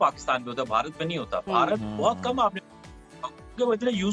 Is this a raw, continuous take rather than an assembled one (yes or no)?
yes